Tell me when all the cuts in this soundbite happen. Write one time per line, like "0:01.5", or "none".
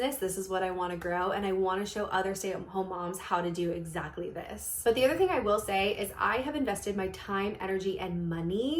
0:04.8